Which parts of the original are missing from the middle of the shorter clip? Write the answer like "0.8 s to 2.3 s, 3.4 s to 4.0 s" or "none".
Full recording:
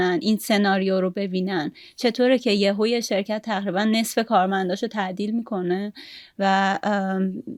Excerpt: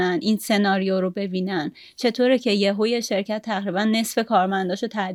none